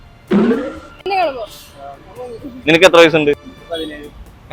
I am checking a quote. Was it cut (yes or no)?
yes